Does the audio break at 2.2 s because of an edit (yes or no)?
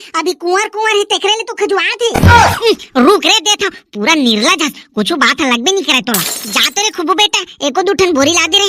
yes